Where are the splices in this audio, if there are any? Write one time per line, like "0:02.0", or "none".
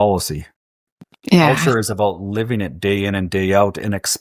none